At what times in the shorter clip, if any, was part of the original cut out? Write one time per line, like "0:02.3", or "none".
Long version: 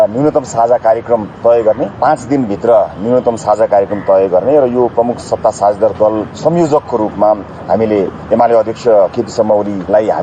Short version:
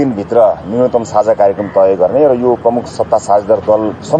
none